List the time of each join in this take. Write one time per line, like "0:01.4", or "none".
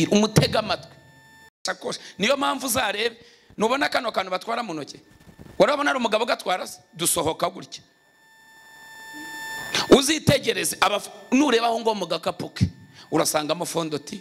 0:01.6

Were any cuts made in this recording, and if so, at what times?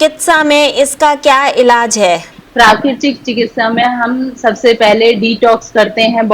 0:02.4

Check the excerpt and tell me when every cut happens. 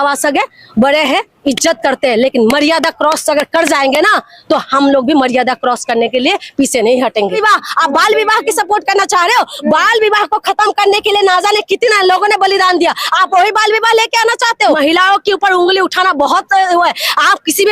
0:07.4
0:14.8

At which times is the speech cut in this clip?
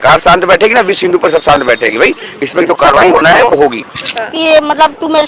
0:04.0

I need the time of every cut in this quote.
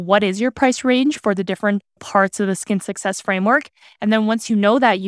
0:01.9

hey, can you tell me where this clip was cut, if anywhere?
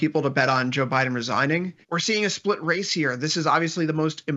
0:01.8

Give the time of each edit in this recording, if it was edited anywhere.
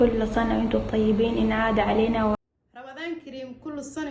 0:02.4

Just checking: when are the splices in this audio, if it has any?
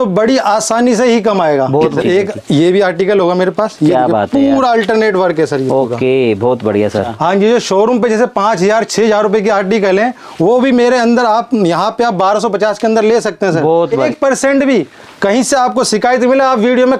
0:01.9
0:07.0
0:14.1

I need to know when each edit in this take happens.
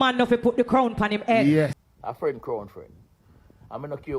0:01.9

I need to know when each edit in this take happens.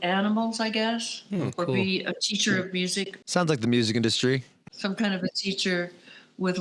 0:03.1
0:04.7

